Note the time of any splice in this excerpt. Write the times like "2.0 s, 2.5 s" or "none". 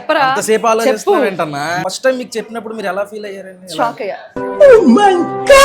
1.8 s